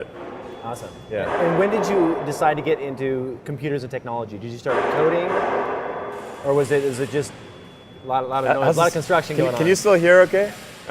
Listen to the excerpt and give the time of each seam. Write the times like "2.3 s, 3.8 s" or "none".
1.6 s